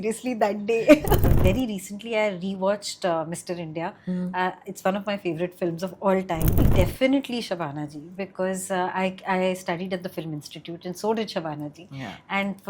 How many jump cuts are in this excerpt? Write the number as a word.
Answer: two